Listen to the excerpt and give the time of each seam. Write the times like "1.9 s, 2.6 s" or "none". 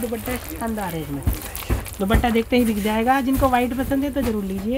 none